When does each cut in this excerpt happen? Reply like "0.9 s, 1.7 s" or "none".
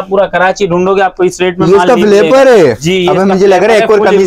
none